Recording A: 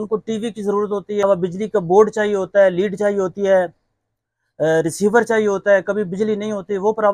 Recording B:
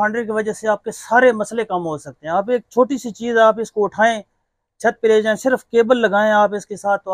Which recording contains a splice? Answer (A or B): A